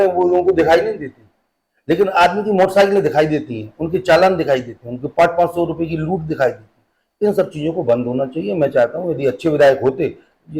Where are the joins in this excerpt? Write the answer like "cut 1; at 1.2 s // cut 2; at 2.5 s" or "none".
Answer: none